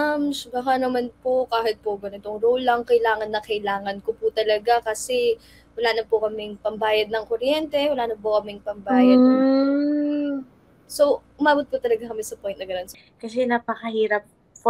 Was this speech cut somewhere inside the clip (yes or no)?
yes